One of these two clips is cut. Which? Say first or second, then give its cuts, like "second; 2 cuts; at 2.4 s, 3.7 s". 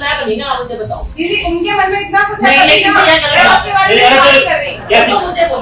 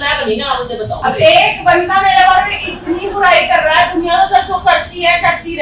second; 1 cut; at 1.0 s